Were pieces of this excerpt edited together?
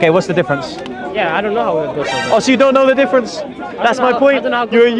no; 0 cuts

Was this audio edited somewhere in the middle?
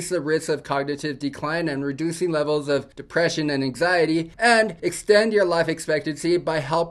no; 0 cuts

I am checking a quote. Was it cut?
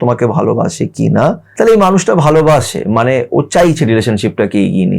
yes; 1 cut; at 1.4 s

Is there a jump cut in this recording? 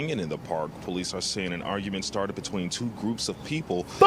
no; 0 cuts

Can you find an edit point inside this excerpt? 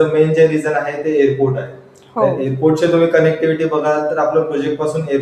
no; 0 cuts

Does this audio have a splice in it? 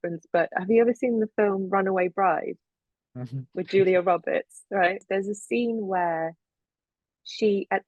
yes; 1 cut; at 5.0 s

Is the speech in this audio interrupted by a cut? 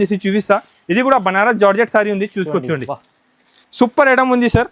yes; 1 cut; at 3.6 s

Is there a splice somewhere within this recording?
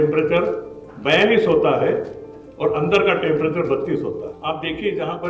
yes; 1 cut; at 4.3 s

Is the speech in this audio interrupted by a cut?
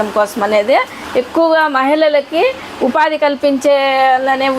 yes; 1 cut; at 1.0 s

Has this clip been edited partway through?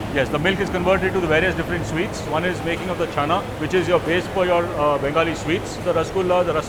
no; 0 cuts

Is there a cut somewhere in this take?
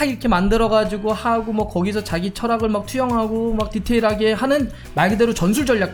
no; 0 cuts

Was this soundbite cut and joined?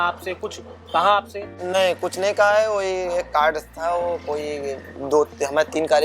yes; 1 cut; at 1.6 s

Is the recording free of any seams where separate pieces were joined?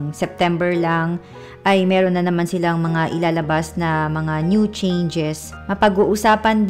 yes; 0 cuts

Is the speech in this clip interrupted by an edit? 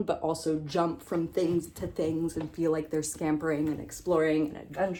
no; 0 cuts

